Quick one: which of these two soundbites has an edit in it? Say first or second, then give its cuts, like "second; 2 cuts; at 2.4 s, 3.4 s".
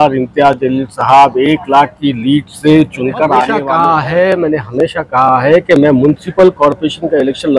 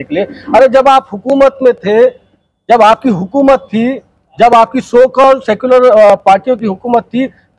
first; 1 cut; at 3.6 s